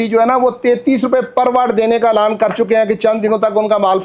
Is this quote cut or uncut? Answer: uncut